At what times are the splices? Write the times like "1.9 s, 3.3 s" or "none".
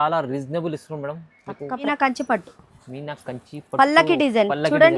1.8 s